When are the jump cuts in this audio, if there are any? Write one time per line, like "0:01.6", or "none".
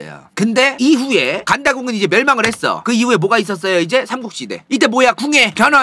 0:04.7